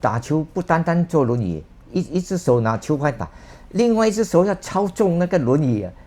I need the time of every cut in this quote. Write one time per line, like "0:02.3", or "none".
none